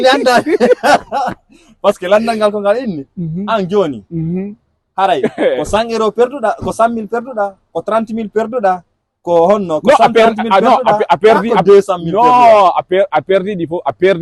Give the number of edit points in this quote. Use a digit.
0